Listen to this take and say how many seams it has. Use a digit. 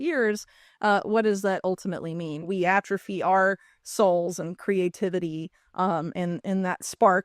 1